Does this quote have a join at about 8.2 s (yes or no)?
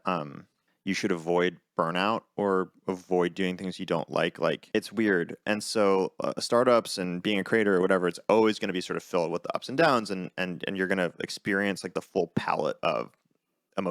no